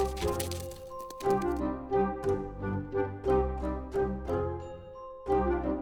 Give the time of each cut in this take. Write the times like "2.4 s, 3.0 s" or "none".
none